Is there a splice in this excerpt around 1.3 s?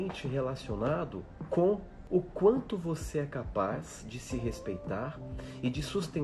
yes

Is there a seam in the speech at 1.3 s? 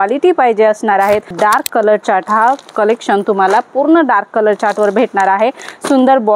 yes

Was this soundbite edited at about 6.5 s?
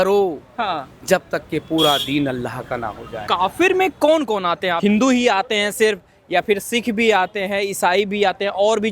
no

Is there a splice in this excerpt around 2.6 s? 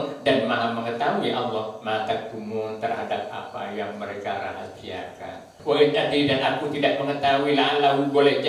no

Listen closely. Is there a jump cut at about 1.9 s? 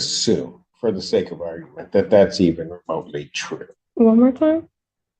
no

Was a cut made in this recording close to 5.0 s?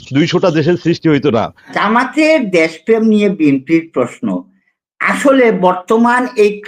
no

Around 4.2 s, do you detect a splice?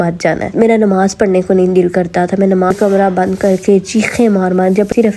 no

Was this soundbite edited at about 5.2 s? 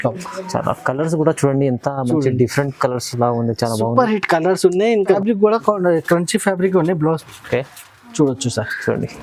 yes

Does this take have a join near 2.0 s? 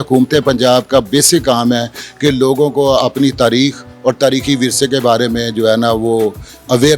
no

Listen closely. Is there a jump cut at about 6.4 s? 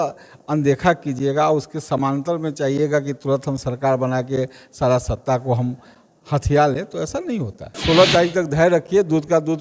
no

